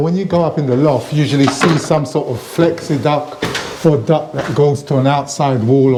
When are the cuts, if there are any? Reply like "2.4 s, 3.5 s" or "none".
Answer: none